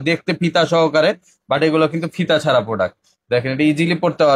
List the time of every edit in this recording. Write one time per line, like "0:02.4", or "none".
none